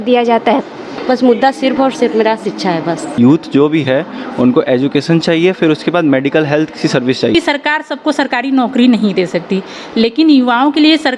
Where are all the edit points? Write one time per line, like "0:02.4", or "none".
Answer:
0:00.9
0:03.1
0:07.3